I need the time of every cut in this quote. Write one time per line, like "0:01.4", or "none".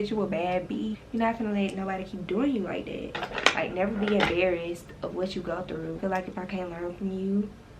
0:01.0
0:03.3
0:06.0